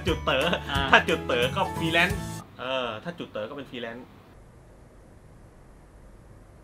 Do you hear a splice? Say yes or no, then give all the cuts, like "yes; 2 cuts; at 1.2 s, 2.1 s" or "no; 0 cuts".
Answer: no; 0 cuts